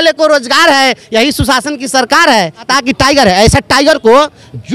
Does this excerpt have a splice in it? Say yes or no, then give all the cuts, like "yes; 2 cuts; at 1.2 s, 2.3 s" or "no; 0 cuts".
yes; 1 cut; at 2.7 s